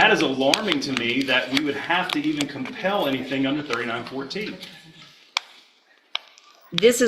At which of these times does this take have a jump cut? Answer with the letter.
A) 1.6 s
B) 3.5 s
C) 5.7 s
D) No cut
D